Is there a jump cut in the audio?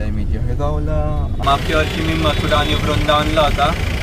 yes; 1 cut; at 1.4 s

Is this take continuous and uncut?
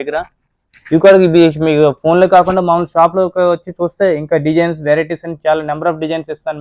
yes; 0 cuts

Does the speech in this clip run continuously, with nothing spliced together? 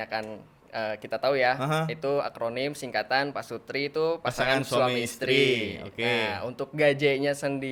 yes; 0 cuts

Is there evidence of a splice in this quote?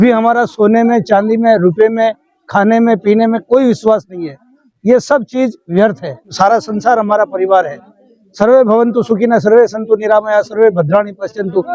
yes; 1 cut; at 6.2 s

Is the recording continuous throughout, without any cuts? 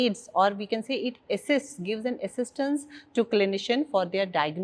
yes; 0 cuts

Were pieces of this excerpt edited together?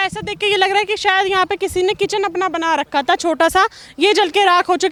no; 0 cuts

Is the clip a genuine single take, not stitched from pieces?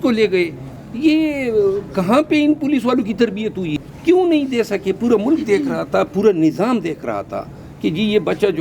no; 1 cut; at 3.8 s

